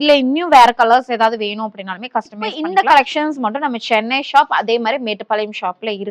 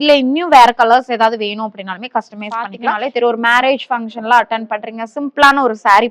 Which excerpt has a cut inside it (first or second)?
second